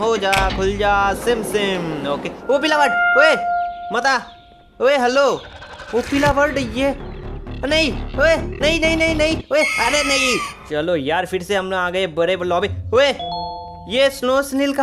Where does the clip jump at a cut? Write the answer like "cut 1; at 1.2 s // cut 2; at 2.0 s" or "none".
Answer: cut 1; at 10.5 s